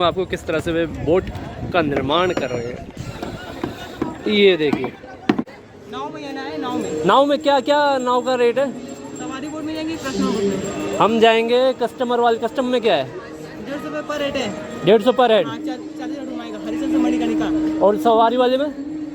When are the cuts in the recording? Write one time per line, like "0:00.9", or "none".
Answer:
0:05.6